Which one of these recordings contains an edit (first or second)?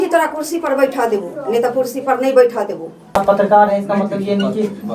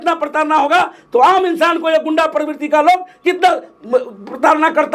first